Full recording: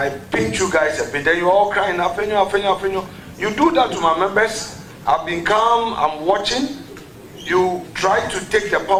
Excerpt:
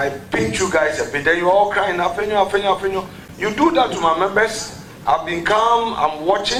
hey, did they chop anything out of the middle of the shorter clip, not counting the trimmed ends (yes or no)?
no